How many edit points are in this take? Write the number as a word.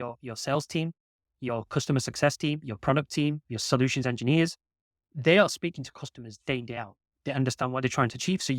one